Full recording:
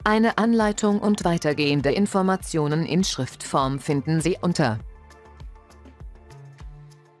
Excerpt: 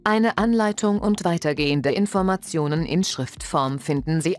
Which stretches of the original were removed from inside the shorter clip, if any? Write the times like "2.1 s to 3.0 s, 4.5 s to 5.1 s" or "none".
none